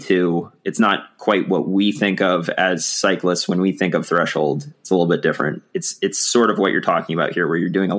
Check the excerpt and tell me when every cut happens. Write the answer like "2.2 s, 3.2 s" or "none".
none